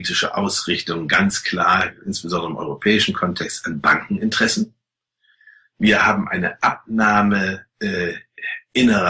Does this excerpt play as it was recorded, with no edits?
yes; 0 cuts

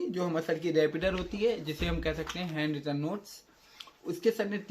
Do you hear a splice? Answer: no; 0 cuts

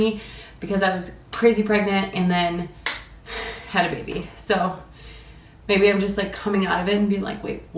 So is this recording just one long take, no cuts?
yes; 0 cuts

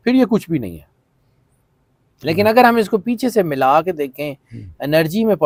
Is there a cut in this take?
no; 0 cuts

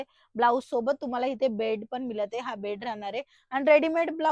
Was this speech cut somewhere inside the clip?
no; 0 cuts

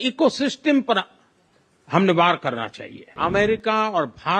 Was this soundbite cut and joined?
yes; 1 cut; at 3.1 s

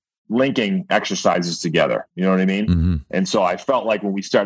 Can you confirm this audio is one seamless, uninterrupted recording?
yes; 0 cuts

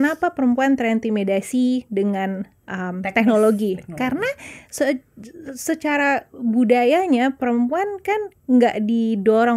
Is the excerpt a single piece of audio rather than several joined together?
yes; 0 cuts

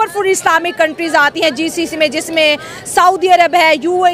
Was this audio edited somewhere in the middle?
no; 0 cuts

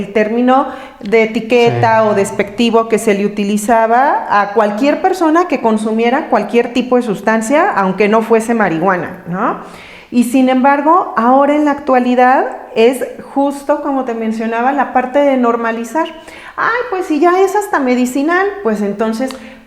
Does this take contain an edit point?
no; 0 cuts

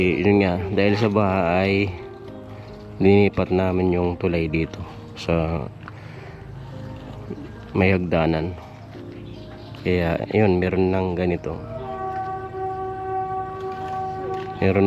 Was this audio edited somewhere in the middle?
no; 0 cuts

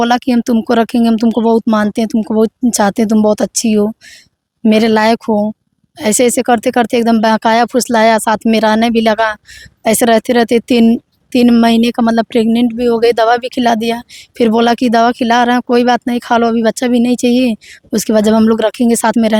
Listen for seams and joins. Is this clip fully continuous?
yes; 0 cuts

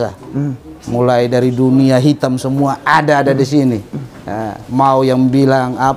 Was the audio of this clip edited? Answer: no; 0 cuts

